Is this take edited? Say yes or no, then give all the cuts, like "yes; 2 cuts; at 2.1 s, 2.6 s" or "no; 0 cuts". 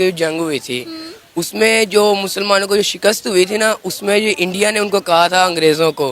no; 0 cuts